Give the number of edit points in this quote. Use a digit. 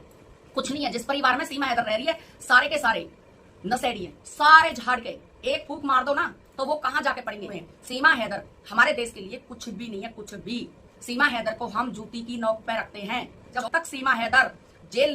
2